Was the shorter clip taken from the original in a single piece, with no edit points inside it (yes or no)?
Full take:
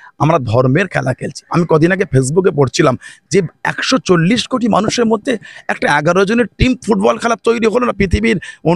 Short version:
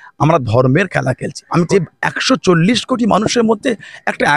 no